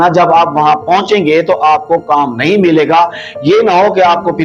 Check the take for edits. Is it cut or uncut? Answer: uncut